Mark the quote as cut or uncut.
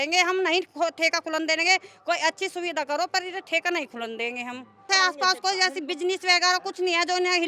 cut